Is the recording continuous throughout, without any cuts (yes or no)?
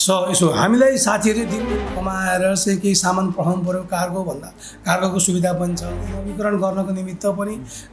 no